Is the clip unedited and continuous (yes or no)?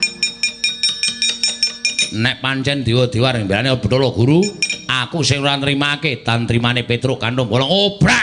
yes